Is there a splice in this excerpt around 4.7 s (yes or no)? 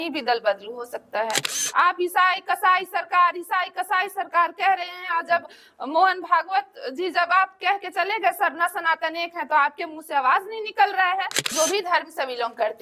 no